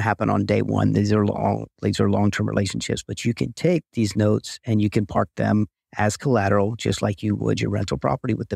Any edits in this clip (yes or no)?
no